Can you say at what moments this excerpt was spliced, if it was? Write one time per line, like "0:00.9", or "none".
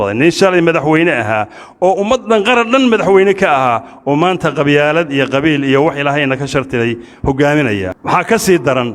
0:07.9